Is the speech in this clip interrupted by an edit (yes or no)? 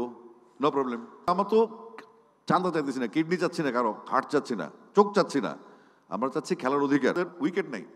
yes